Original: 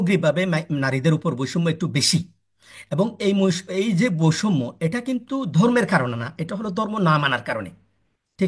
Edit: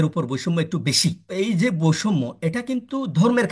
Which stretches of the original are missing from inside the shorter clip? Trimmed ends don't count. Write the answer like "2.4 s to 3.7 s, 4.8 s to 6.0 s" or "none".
2.3 s to 3.6 s